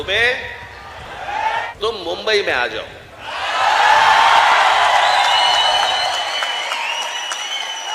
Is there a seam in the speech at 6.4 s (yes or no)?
no